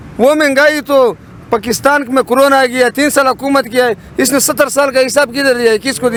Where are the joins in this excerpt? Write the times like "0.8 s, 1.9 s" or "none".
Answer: none